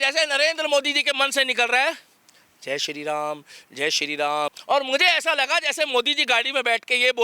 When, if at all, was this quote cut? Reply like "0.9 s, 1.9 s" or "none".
4.6 s

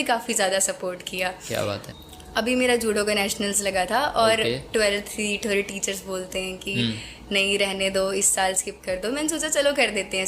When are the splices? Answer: 1.9 s

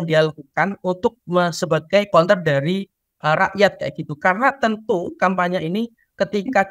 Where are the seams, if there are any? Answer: 2.1 s

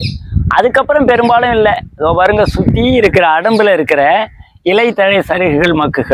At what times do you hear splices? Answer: none

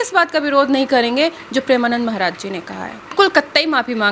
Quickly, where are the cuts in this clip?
3.1 s

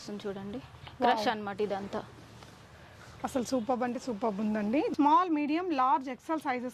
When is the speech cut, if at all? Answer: 4.9 s

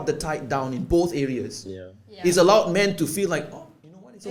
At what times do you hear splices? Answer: none

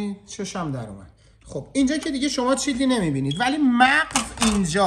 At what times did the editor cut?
none

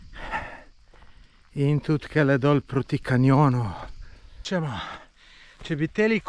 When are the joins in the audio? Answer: 4.4 s

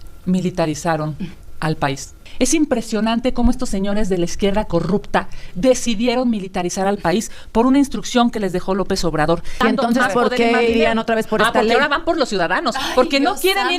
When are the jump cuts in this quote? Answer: 2.2 s, 9.5 s

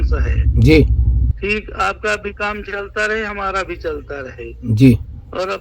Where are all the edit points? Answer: 1.3 s

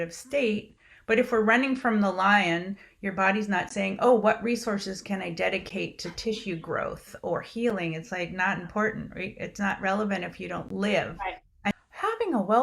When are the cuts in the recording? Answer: 11.7 s

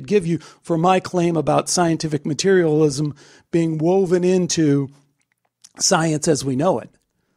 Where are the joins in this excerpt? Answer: none

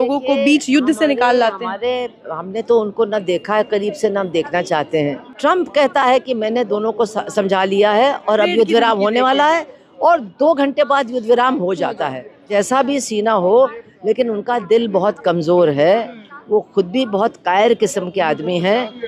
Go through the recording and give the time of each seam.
5.2 s, 12.3 s

